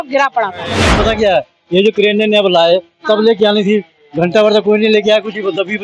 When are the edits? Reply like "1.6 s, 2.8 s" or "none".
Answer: 0.9 s